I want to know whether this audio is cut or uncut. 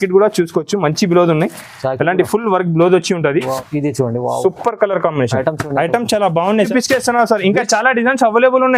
cut